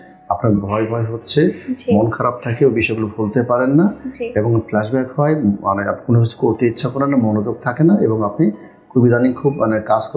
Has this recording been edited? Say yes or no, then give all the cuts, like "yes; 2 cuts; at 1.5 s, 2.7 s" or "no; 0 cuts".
no; 0 cuts